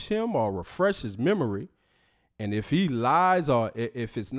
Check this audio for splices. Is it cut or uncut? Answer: cut